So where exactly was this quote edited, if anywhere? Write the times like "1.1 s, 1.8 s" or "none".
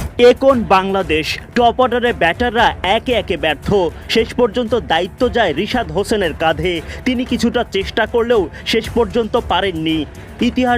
none